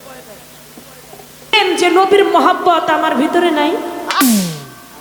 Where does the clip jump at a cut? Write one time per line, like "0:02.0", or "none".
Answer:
0:01.5